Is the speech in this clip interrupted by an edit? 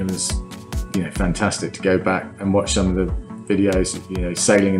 yes; 1 cut; at 2.3 s

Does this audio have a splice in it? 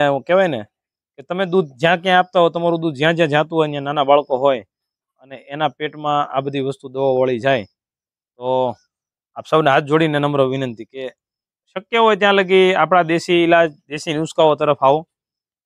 no; 0 cuts

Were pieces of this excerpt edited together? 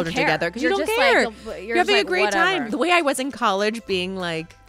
yes; 1 cut; at 2.6 s

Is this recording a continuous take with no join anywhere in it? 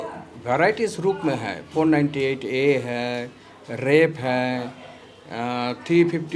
yes; 0 cuts

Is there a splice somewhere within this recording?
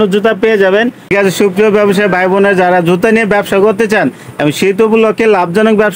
yes; 1 cut; at 1.1 s

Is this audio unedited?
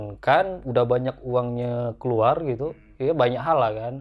yes; 0 cuts

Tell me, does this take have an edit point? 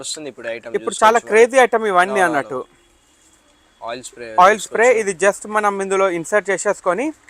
no; 0 cuts

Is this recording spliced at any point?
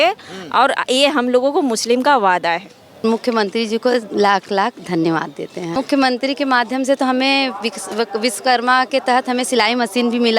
yes; 2 cuts; at 3.0 s, 5.7 s

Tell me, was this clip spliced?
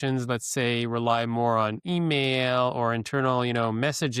no; 0 cuts

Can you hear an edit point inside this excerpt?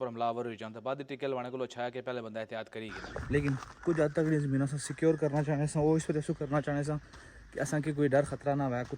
yes; 1 cut; at 3.2 s

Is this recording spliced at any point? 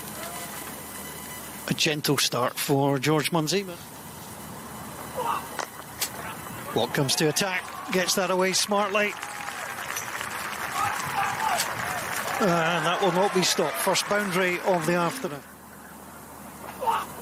no; 0 cuts

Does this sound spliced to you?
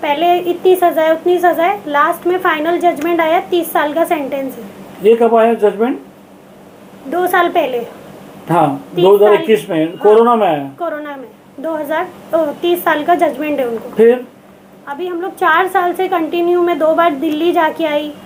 no; 0 cuts

